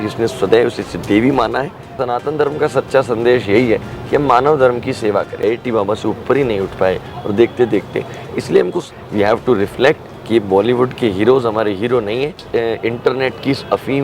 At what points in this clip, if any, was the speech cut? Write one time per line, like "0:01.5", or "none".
0:01.9
0:05.4
0:08.8
0:12.4